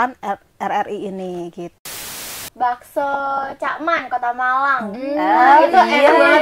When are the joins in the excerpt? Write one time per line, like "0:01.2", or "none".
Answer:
0:02.2

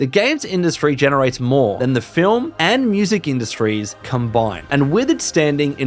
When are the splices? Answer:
none

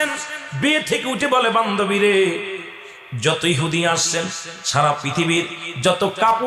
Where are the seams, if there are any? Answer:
none

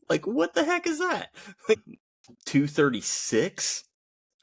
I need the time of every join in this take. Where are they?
0:02.0

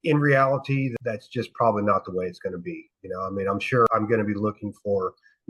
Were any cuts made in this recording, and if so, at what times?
0:00.9
0:03.9

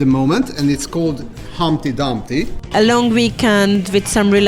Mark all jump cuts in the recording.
0:02.6

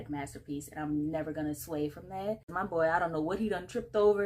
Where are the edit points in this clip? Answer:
0:02.5

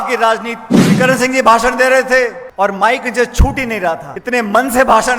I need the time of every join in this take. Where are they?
0:00.9
0:02.4
0:04.1

